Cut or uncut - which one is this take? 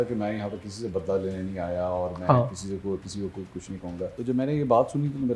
cut